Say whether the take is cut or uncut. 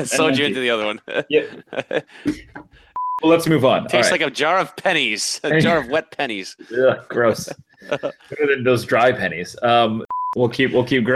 cut